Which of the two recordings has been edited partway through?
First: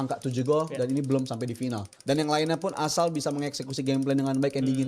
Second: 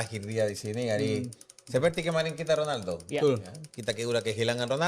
first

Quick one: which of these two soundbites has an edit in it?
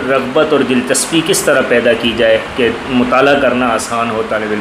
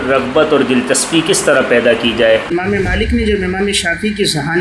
second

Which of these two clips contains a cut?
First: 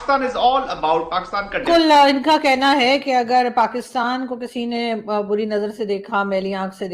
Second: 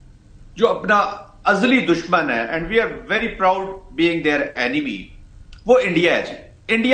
first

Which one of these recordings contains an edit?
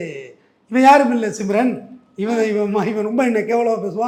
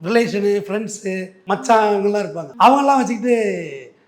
second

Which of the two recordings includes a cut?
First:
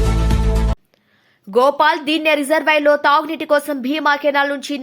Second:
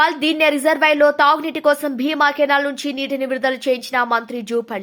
first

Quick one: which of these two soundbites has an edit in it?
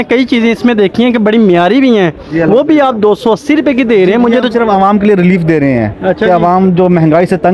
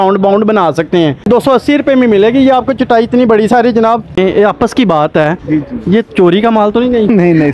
second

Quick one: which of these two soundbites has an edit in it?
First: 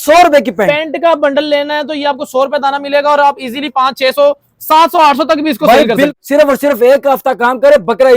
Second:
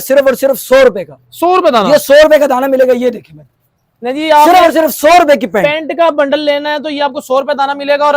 first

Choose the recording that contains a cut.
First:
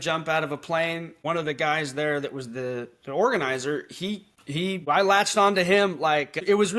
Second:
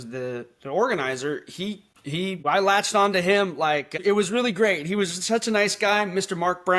first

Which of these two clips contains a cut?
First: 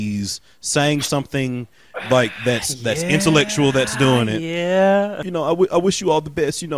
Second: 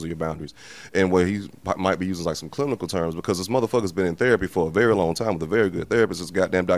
first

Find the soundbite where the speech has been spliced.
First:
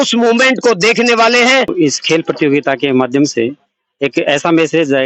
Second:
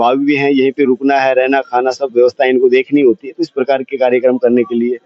first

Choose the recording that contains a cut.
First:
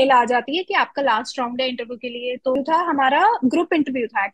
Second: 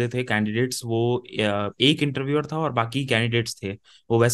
first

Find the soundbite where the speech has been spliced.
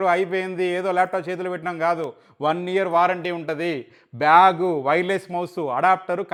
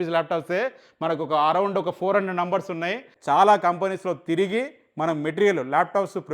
second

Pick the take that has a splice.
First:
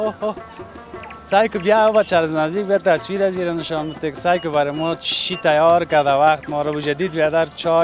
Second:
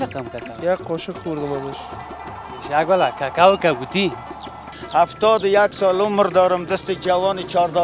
second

